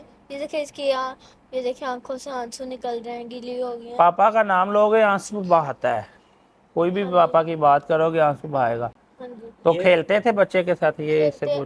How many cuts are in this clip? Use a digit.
0